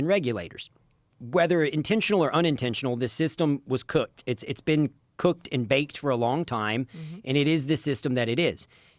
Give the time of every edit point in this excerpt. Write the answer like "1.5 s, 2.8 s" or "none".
none

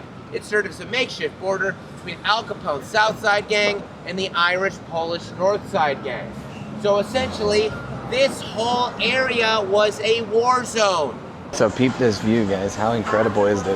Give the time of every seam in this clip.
11.4 s

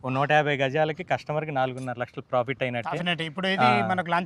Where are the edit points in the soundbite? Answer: none

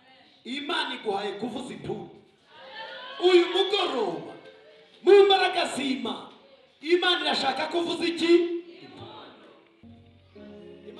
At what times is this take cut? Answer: 9.8 s

